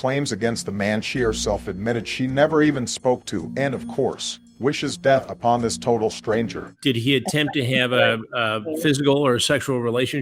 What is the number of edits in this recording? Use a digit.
1